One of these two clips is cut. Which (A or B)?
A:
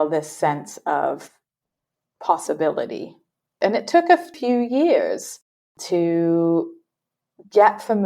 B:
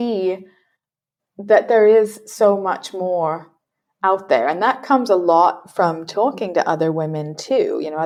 A